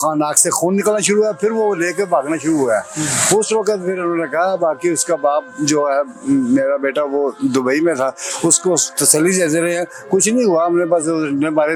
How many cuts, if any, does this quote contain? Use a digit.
0